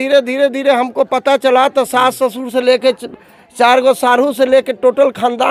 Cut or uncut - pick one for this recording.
uncut